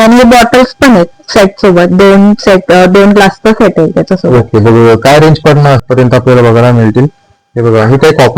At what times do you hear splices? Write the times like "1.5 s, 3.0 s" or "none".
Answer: 5.8 s